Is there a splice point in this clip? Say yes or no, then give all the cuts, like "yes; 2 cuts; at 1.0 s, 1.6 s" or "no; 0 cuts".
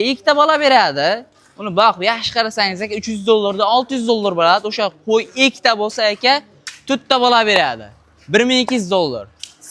no; 0 cuts